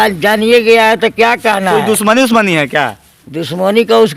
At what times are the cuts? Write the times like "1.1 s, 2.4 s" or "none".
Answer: none

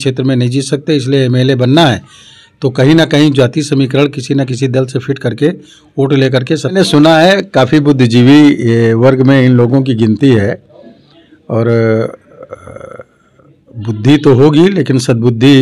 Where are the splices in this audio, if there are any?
6.7 s

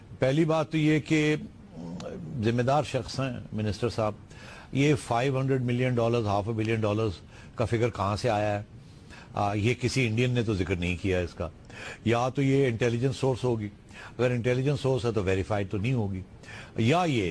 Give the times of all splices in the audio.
9.2 s

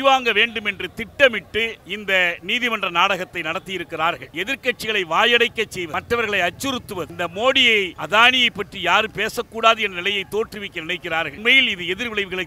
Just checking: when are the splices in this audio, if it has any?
1.9 s, 4.3 s, 5.9 s, 7.1 s, 8.0 s, 11.3 s

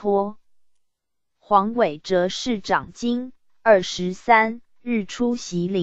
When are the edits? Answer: 2.4 s, 4.7 s

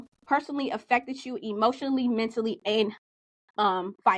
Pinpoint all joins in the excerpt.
none

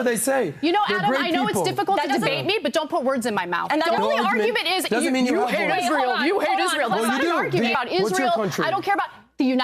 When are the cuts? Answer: 3.9 s, 7.7 s

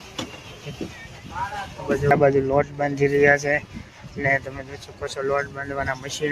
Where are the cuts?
2.1 s

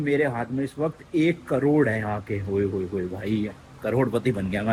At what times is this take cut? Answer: none

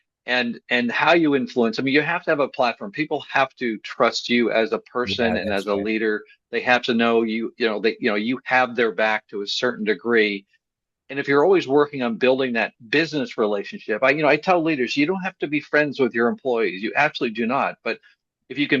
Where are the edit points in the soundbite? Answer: none

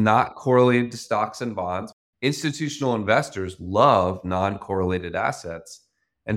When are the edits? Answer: 2.0 s

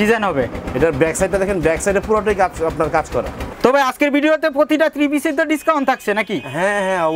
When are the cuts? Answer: 3.4 s

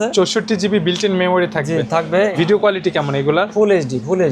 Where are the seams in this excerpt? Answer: 2.3 s

